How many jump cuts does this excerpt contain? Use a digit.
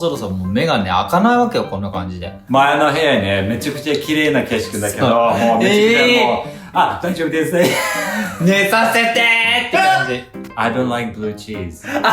2